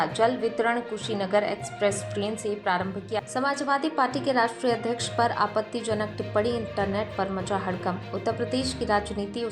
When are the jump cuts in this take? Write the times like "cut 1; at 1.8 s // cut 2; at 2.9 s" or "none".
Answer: cut 1; at 3.2 s